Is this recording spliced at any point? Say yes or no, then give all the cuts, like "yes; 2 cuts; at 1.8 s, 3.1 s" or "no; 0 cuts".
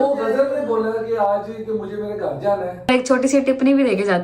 yes; 1 cut; at 2.9 s